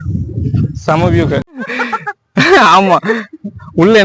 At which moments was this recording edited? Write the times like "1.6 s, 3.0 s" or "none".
1.6 s